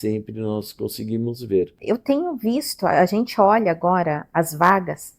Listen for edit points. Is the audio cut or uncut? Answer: cut